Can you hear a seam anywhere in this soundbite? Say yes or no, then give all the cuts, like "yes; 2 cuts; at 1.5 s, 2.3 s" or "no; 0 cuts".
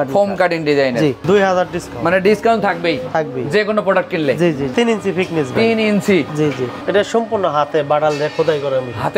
yes; 3 cuts; at 1.2 s, 4.7 s, 6.8 s